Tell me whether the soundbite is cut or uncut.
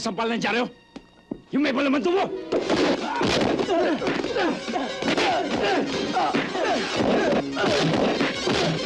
uncut